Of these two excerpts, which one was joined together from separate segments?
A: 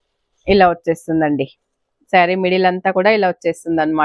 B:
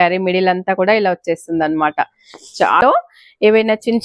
B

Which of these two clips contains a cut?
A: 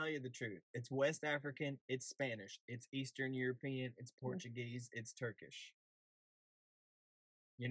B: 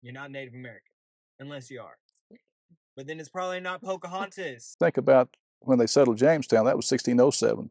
B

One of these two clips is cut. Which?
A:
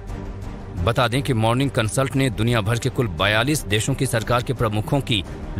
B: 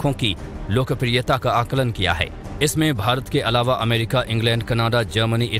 A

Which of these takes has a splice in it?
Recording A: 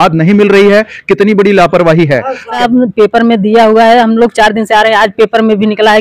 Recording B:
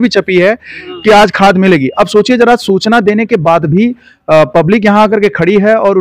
A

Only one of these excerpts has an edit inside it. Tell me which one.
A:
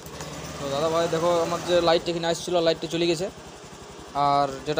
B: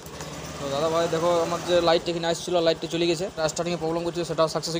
B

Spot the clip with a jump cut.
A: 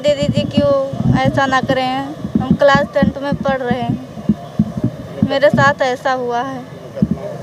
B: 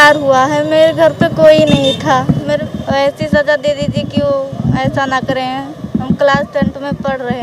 B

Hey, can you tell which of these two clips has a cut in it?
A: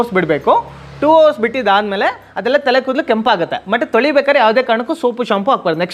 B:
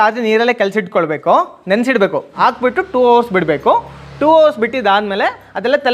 B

